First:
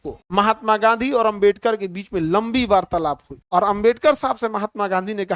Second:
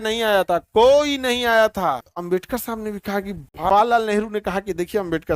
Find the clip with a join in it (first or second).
second